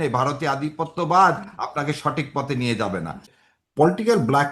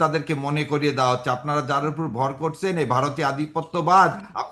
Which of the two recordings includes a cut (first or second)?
first